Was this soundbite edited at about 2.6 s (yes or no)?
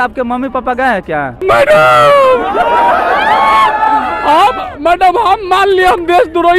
no